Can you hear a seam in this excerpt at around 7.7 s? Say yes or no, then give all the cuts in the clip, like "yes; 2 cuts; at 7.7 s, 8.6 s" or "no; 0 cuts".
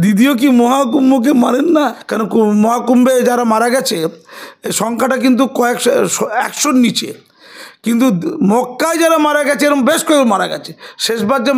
no; 1 cut; at 2.0 s